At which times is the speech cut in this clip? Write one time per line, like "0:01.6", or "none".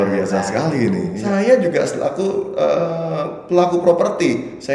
0:01.1

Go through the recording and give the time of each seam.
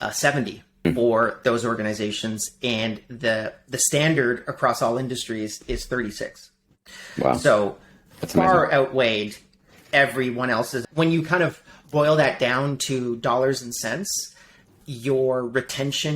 0:00.9
0:10.8

